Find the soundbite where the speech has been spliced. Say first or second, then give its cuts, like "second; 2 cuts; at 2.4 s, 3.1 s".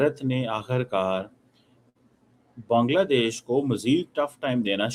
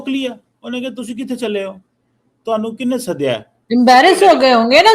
second; 1 cut; at 3.5 s